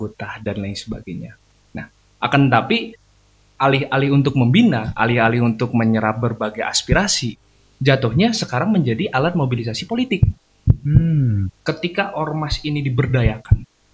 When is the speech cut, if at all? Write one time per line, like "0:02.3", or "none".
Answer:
0:11.5